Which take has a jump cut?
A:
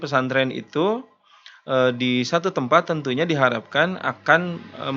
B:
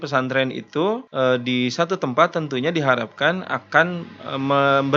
B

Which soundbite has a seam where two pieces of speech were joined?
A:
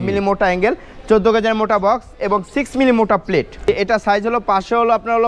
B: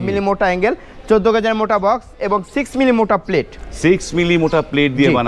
A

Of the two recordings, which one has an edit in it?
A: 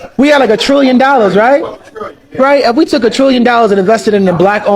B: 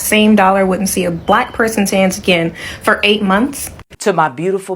B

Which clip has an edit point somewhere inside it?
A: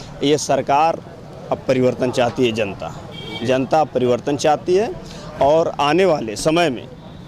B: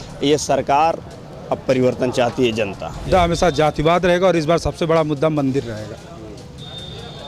B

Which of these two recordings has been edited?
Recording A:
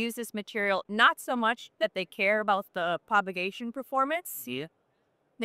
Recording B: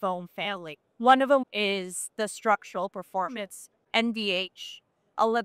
B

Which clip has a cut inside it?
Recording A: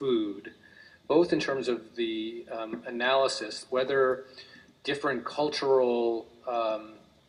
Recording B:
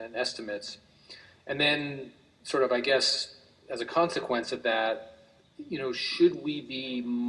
B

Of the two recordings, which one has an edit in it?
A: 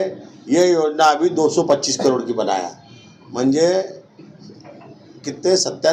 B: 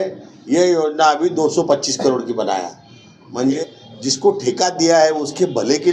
B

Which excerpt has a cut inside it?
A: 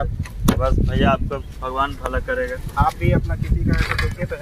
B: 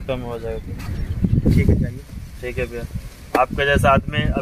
B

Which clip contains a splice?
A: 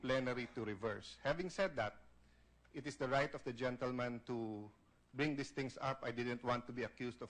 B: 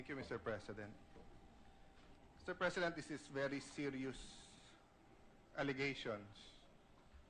A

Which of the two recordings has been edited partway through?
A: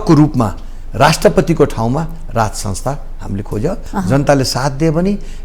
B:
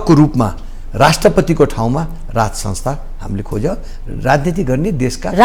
A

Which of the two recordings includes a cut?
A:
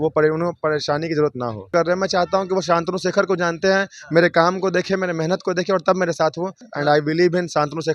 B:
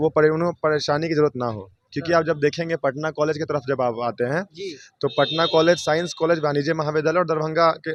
A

